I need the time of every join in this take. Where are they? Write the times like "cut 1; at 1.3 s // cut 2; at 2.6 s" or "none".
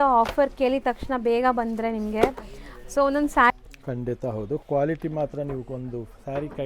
cut 1; at 3.5 s

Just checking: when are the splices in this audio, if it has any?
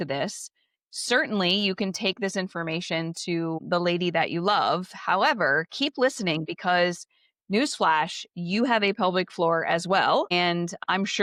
none

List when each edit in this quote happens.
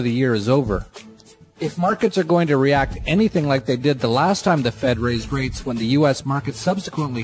cut 1; at 1.9 s

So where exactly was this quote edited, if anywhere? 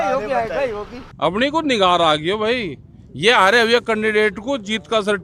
cut 1; at 1.0 s

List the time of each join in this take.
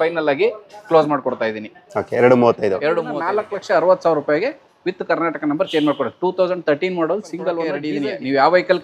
cut 1; at 3.2 s // cut 2; at 7.9 s

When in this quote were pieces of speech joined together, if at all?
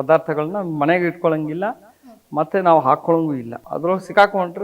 cut 1; at 3.6 s

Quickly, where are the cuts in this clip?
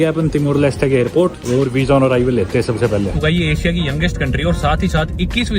cut 1; at 1.4 s // cut 2; at 3.1 s

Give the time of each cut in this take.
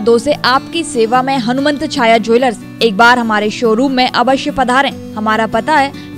none

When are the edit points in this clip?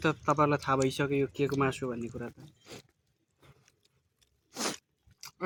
none

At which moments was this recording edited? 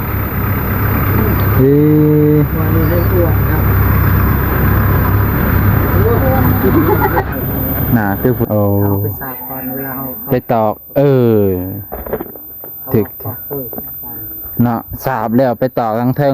cut 1; at 8.4 s

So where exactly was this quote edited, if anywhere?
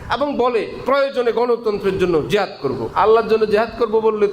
cut 1; at 2.9 s

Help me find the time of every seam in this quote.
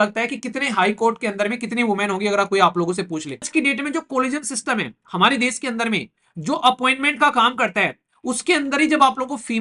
cut 1; at 3.5 s

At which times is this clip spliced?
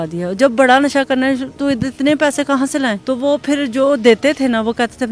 cut 1; at 3.0 s

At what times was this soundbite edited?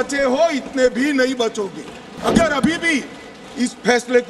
cut 1; at 2.2 s

